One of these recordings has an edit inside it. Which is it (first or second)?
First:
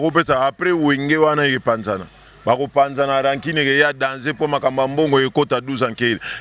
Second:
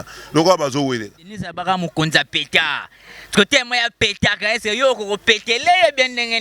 second